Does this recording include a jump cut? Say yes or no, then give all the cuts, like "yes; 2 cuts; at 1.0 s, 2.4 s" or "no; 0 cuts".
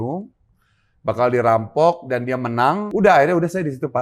yes; 1 cut; at 2.8 s